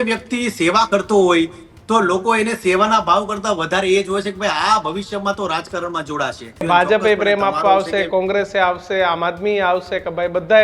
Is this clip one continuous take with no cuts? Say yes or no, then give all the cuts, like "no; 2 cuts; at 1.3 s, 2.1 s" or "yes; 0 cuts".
no; 1 cut; at 6.6 s